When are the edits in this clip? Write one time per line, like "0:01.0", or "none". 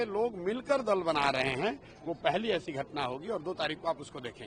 none